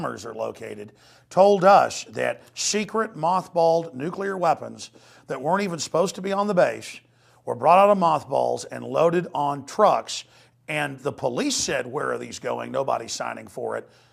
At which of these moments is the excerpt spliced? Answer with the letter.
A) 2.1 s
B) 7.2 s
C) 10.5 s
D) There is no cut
A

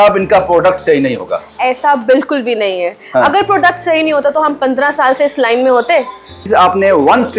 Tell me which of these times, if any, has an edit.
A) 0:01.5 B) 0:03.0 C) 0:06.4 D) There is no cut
C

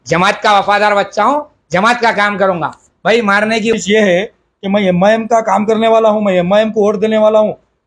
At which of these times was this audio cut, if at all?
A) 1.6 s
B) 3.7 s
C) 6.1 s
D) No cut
B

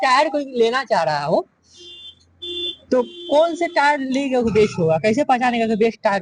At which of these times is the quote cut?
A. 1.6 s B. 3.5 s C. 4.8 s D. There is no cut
A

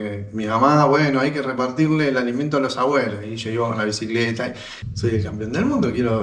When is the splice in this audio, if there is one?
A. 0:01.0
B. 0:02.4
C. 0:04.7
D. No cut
C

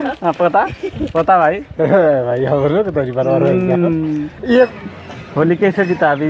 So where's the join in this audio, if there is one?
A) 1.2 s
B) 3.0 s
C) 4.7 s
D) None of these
C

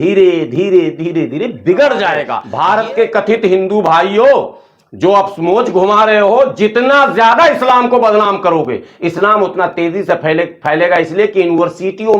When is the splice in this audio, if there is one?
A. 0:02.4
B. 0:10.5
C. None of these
A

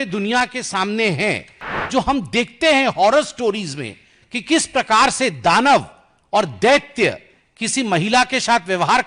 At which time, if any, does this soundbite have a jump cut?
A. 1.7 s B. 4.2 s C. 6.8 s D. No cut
A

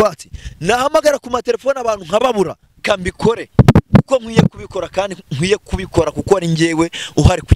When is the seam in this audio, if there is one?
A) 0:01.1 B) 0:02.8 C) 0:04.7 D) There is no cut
B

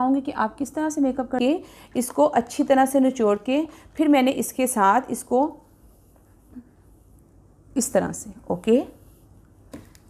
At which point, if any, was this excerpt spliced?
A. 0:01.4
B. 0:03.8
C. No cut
A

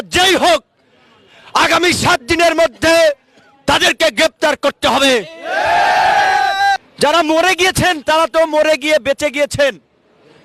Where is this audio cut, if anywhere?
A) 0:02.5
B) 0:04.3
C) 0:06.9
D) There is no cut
C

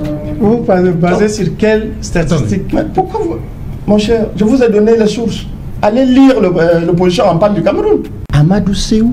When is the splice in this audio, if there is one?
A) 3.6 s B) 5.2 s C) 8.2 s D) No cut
C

